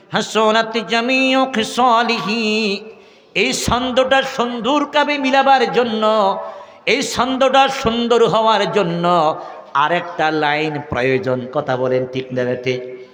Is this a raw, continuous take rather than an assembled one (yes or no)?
yes